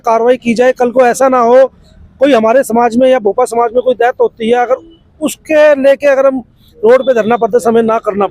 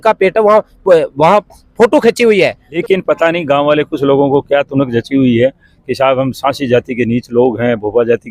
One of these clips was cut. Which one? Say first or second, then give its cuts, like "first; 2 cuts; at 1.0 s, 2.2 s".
second; 1 cut; at 2.7 s